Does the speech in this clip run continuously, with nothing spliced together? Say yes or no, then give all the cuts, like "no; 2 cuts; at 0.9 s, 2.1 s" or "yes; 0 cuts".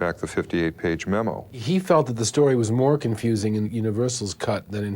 no; 2 cuts; at 1.5 s, 3.7 s